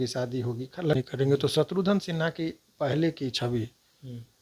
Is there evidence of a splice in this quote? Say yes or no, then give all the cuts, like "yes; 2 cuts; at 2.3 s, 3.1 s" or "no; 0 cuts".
yes; 1 cut; at 1.0 s